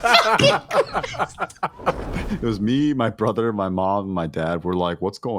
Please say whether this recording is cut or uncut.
cut